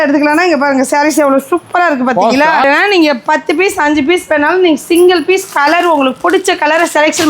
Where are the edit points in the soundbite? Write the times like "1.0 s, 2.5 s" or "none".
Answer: 2.6 s